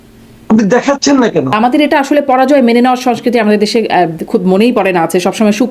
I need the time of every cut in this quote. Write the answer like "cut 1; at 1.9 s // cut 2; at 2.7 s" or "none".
cut 1; at 1.5 s